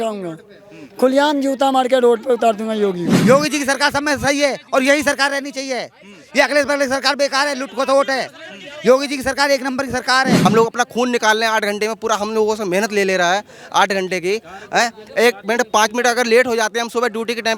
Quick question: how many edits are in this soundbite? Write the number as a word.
two